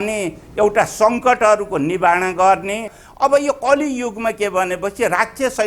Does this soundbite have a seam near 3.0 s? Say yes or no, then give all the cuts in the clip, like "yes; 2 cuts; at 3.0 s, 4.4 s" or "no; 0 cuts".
yes; 1 cut; at 3.0 s